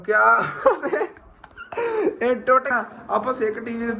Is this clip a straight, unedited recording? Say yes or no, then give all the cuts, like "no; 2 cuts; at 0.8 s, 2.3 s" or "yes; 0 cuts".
no; 1 cut; at 2.7 s